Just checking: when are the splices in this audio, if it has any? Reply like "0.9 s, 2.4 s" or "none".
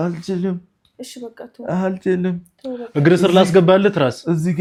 none